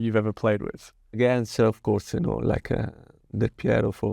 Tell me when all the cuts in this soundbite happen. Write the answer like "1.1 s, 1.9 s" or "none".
1.2 s